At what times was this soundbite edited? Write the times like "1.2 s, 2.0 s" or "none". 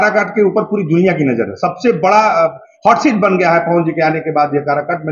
none